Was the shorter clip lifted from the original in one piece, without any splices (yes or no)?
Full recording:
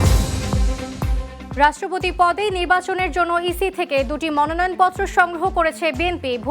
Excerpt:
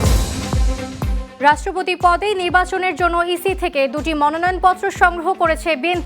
no